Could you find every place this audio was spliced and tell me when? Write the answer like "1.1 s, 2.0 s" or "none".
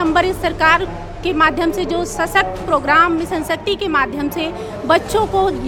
none